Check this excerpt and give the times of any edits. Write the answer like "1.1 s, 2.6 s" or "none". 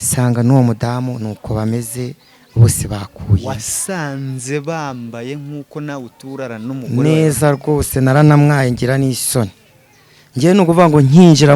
none